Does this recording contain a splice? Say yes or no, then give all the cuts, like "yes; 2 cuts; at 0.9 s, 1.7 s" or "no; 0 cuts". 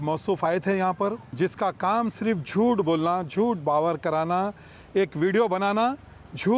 yes; 1 cut; at 1.2 s